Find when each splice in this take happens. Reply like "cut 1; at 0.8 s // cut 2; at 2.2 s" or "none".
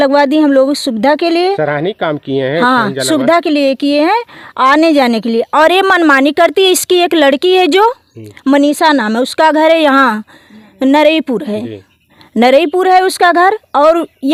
none